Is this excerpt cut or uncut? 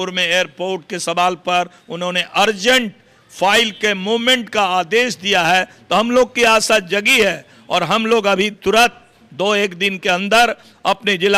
uncut